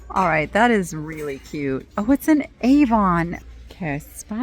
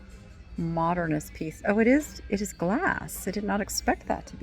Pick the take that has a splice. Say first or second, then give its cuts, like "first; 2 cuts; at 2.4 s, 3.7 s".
first; 1 cut; at 3.4 s